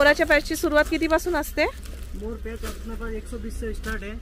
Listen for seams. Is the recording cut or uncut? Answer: uncut